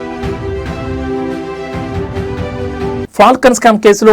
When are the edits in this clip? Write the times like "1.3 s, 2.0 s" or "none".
2.7 s